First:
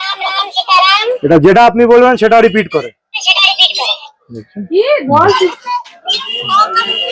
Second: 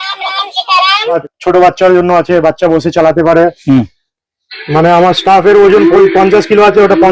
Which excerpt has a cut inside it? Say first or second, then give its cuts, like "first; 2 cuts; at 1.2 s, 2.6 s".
second; 1 cut; at 1.2 s